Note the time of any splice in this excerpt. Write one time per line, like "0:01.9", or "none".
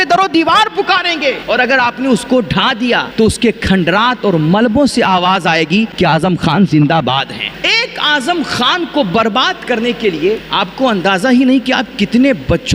0:01.4
0:03.1
0:05.9
0:07.5
0:10.5